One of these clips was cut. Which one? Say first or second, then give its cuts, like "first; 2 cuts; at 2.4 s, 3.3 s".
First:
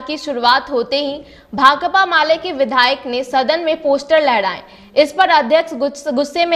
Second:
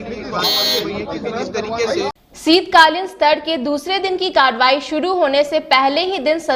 second; 1 cut; at 2.4 s